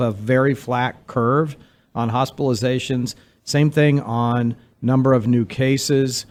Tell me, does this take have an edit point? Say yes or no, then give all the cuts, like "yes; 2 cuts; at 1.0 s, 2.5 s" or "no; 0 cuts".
no; 0 cuts